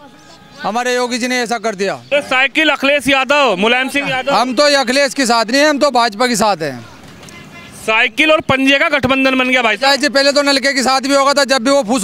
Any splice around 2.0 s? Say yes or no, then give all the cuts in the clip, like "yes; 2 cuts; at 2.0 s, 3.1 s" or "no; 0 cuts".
yes; 1 cut; at 2.0 s